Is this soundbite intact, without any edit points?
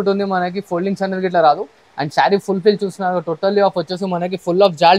yes; 0 cuts

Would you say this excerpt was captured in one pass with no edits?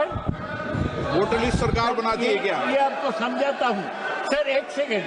yes; 0 cuts

